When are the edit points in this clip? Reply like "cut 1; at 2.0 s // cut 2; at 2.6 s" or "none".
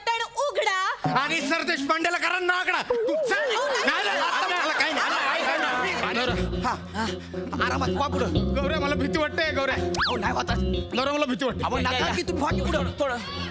cut 1; at 6.1 s